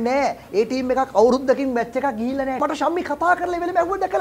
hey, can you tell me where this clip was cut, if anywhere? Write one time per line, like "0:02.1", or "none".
0:02.6